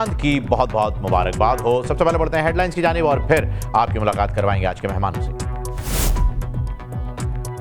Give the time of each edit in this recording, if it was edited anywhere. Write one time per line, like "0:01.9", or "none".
none